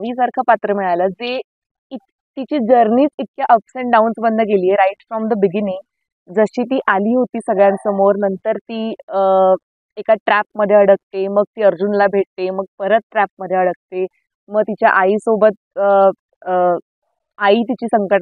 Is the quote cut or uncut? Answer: uncut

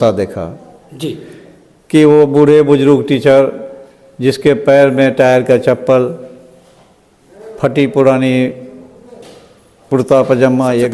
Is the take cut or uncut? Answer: uncut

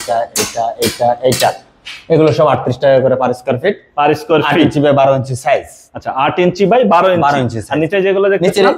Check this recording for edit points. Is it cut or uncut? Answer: uncut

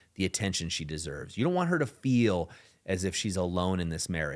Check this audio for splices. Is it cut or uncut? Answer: uncut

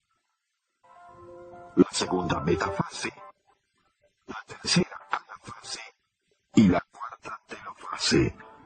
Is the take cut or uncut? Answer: cut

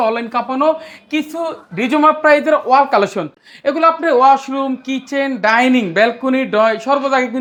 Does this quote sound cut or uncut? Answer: uncut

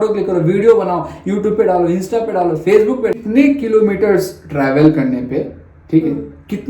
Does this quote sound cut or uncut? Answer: cut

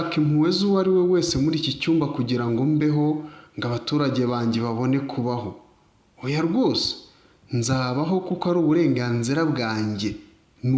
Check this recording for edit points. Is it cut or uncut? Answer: uncut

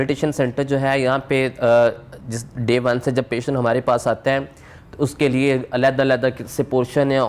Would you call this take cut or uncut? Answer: uncut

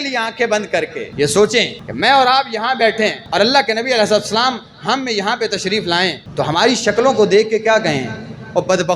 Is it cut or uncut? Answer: cut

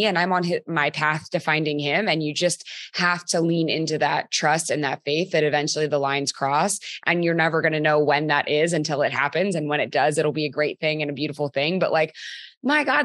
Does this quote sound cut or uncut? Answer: uncut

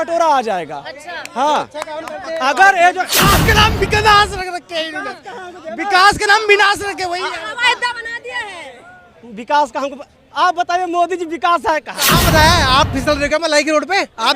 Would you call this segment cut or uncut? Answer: cut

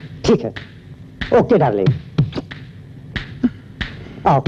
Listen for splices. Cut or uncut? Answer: uncut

